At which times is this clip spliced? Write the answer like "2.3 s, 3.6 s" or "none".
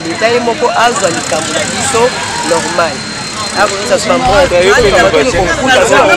none